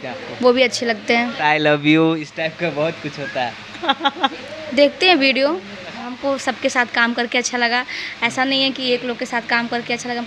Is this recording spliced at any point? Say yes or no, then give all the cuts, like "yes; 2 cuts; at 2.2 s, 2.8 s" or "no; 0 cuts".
yes; 3 cuts; at 1.4 s, 4.5 s, 6.0 s